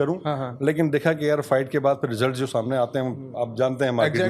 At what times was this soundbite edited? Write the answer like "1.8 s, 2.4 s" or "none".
none